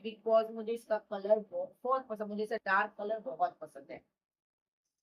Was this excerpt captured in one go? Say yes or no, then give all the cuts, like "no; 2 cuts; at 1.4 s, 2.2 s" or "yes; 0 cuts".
yes; 0 cuts